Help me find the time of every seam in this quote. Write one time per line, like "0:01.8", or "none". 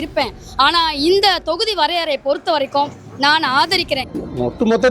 0:04.0